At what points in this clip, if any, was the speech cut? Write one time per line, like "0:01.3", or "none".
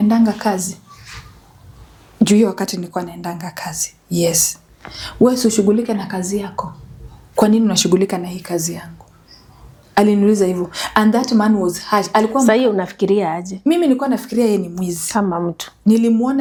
none